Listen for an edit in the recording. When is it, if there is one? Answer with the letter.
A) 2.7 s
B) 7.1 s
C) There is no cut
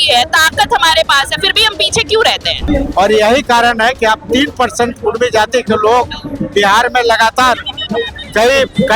A